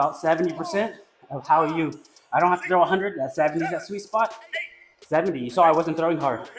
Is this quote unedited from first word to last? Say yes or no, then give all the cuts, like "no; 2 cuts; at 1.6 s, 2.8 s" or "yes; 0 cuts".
yes; 0 cuts